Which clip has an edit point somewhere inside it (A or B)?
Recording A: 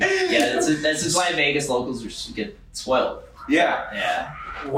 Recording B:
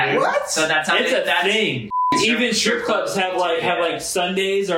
B